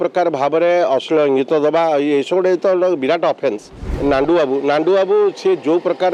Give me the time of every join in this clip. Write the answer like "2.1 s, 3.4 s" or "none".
3.9 s